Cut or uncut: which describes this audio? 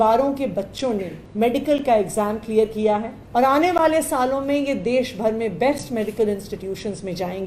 cut